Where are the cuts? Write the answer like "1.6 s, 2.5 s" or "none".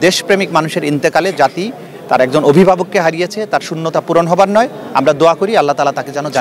none